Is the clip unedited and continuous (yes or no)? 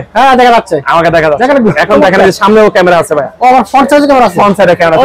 yes